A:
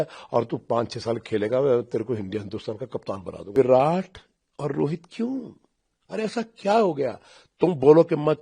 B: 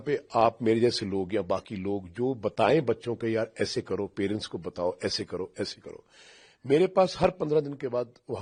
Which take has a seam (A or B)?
A